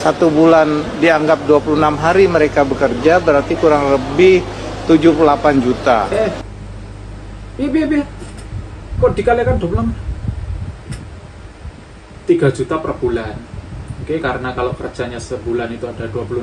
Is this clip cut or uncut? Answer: uncut